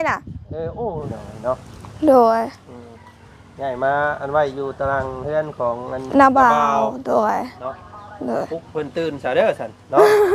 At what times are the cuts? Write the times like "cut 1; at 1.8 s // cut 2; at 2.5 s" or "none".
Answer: cut 1; at 1.2 s